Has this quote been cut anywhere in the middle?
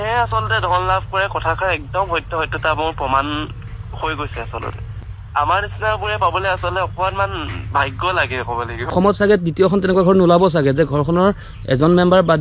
yes; 2 cuts; at 5.1 s, 8.9 s

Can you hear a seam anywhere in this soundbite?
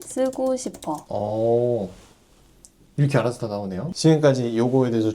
yes; 2 cuts; at 1.1 s, 3.9 s

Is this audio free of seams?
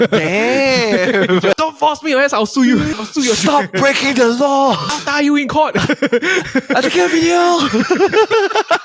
no; 3 cuts; at 1.6 s, 2.9 s, 4.9 s

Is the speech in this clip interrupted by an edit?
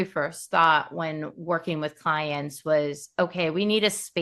no; 0 cuts

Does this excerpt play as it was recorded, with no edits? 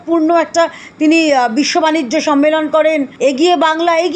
no; 1 cut; at 3.1 s

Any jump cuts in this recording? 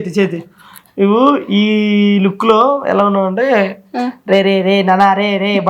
no; 0 cuts

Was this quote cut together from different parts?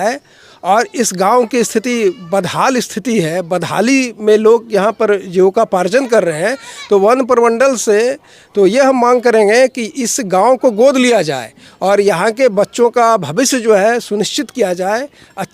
no; 0 cuts

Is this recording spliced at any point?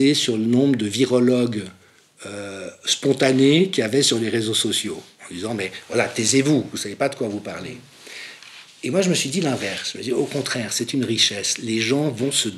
no; 0 cuts

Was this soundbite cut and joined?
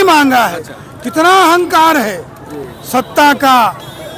no; 0 cuts

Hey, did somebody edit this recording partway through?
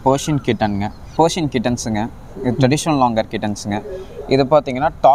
yes; 1 cut; at 1.1 s

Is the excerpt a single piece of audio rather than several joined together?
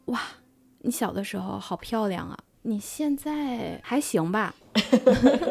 no; 3 cuts; at 2.4 s, 3.8 s, 4.6 s

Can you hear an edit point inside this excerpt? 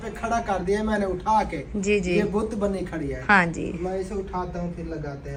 no; 0 cuts

